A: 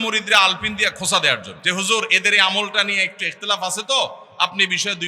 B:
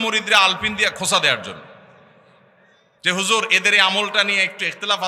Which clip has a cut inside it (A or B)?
A